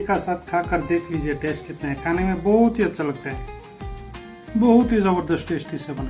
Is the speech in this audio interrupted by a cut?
no; 0 cuts

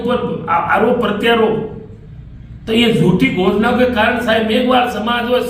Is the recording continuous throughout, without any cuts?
yes; 0 cuts

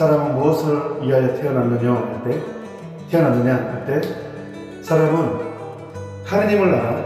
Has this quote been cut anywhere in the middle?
no; 0 cuts

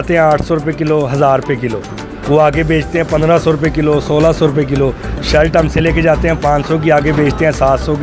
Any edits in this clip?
no; 0 cuts

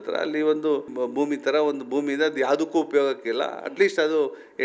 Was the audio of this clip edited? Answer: yes; 1 cut; at 0.9 s

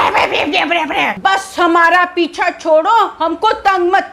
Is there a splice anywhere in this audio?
yes; 1 cut; at 1.1 s

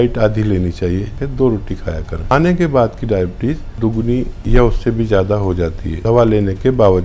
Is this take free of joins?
no; 4 cuts; at 1.2 s, 2.3 s, 4.0 s, 5.9 s

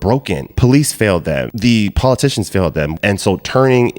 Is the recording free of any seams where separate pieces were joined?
no; 2 cuts; at 1.5 s, 2.9 s

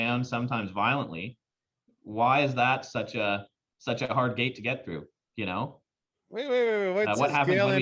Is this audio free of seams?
yes; 0 cuts

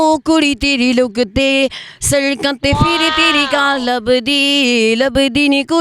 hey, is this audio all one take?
yes; 0 cuts

